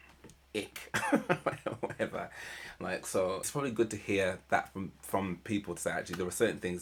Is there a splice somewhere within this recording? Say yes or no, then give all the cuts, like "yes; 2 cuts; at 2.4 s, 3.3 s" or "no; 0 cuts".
no; 0 cuts